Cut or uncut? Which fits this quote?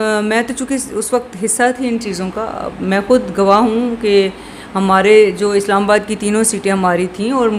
uncut